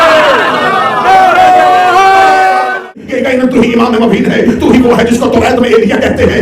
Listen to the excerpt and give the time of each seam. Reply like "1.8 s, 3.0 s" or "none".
2.8 s